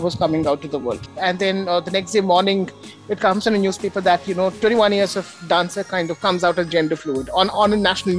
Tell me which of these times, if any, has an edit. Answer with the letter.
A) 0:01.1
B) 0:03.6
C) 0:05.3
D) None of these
A